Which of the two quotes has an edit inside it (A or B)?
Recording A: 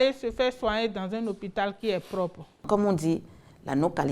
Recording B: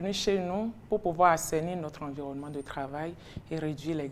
A